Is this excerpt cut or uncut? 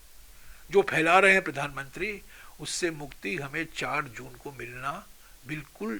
uncut